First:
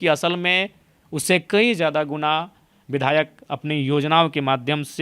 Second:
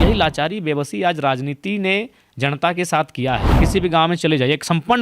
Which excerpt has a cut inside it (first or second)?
second